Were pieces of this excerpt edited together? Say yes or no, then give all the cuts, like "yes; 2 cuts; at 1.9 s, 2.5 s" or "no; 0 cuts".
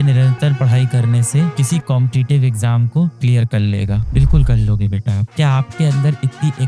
yes; 1 cut; at 5.3 s